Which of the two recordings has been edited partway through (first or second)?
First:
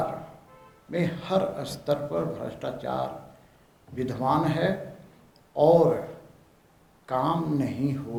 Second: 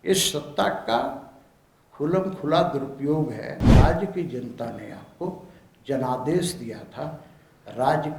second